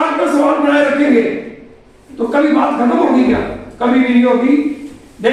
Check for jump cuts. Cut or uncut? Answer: uncut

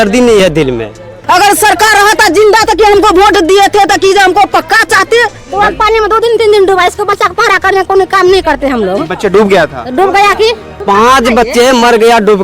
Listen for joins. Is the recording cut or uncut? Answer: cut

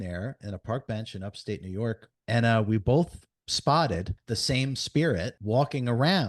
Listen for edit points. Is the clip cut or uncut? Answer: cut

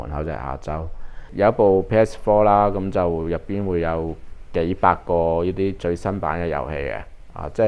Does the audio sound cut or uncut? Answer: cut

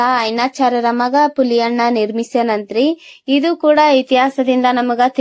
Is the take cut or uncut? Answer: uncut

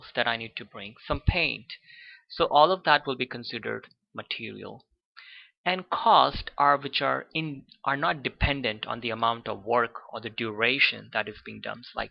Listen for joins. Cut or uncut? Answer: cut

